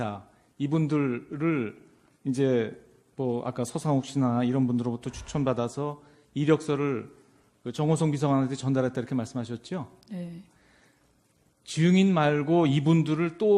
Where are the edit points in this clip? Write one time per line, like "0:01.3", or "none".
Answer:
none

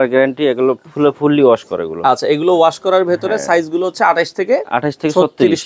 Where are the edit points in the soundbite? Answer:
none

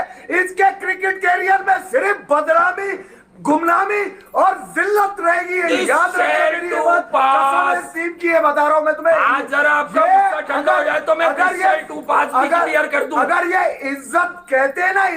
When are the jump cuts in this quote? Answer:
none

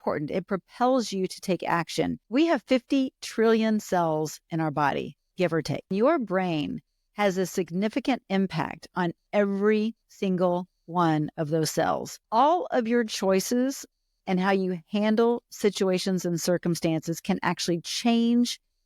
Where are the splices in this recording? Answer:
0:02.2
0:05.9
0:12.2

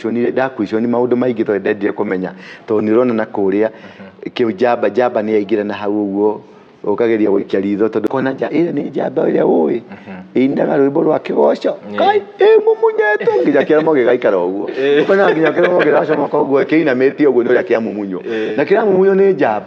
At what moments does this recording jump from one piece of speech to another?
0:08.1

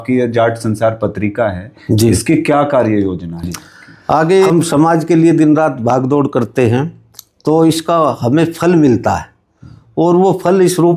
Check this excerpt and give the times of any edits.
0:04.5

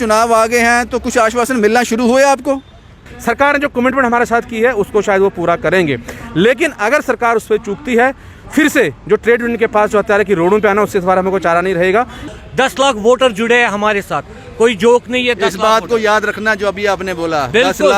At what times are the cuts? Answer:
0:03.1
0:12.2

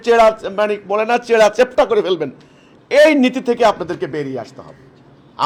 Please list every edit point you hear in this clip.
none

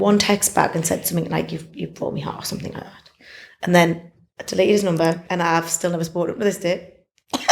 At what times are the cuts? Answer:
0:05.2

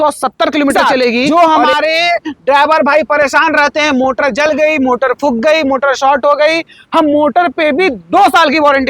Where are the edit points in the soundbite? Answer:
0:01.2

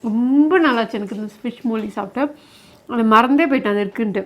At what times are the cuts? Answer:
none

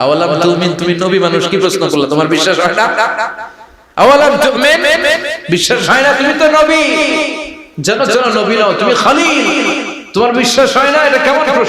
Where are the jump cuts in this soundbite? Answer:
0:10.0

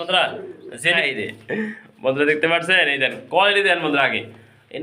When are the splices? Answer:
0:01.0

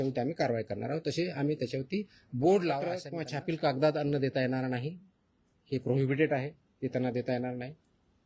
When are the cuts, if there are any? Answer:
0:03.1

